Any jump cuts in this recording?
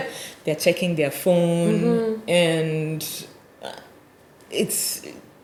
no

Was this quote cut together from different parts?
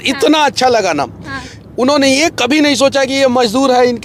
no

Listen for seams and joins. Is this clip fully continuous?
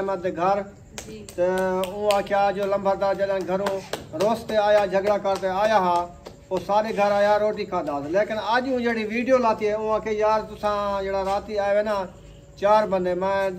yes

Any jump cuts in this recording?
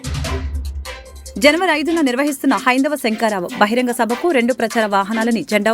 yes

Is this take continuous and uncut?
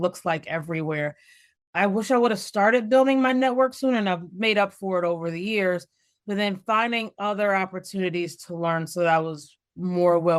yes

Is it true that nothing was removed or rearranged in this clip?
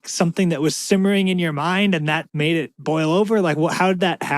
no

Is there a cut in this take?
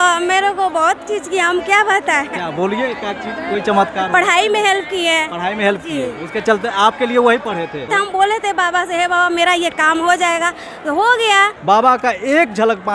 yes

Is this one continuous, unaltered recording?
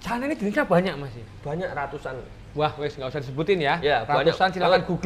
yes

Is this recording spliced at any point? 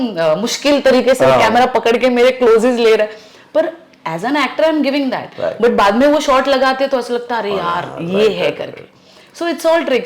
no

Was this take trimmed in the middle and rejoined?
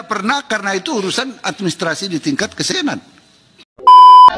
yes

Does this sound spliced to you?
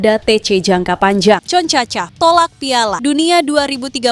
yes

